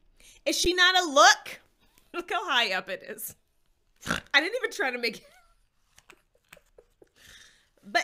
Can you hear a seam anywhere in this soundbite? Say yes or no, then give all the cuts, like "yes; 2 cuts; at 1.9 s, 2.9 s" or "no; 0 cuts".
no; 0 cuts